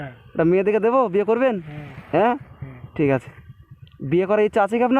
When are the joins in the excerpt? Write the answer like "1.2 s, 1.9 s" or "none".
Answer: none